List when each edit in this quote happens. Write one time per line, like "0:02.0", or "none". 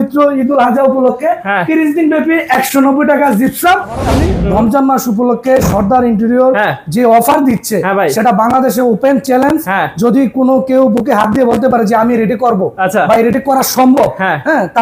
0:04.1